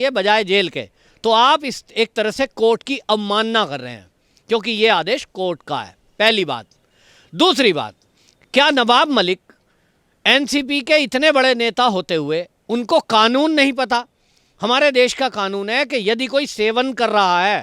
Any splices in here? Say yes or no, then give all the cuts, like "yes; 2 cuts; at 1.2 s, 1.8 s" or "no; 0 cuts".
no; 0 cuts